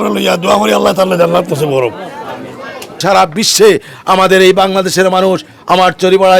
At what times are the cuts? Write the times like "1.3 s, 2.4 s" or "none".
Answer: 3.0 s